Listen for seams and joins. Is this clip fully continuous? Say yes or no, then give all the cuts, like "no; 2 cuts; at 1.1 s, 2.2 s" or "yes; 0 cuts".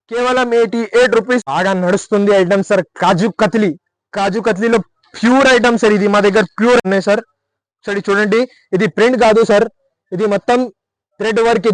no; 2 cuts; at 1.4 s, 6.8 s